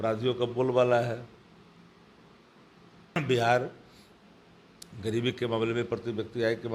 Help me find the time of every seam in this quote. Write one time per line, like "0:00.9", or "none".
0:03.2